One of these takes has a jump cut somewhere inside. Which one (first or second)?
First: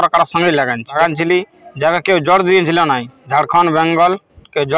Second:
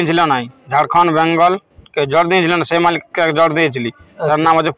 first